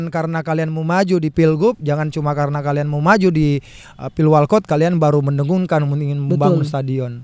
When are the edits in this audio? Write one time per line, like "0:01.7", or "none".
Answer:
none